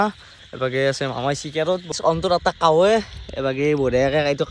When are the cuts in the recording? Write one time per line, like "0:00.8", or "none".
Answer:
0:01.9

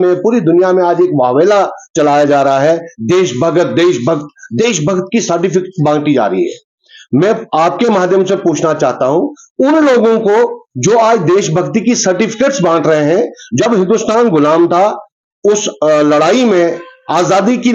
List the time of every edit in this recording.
none

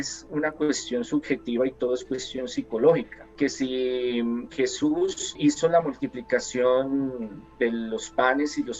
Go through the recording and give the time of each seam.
0:03.2
0:05.4

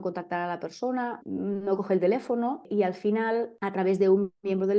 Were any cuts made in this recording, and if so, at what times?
0:01.2
0:02.7
0:03.5

